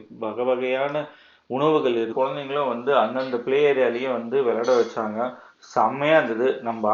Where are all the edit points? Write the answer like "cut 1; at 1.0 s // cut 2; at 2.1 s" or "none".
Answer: cut 1; at 2.1 s

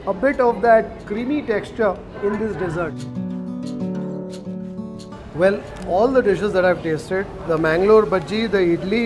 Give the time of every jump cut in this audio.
cut 1; at 5.1 s

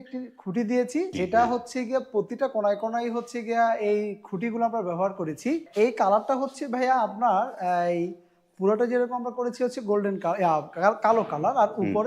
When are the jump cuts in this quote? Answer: cut 1; at 1.1 s // cut 2; at 5.7 s

